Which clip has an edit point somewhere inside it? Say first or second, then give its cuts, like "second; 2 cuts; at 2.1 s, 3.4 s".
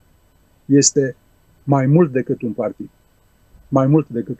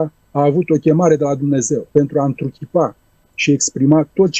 second; 1 cut; at 1.9 s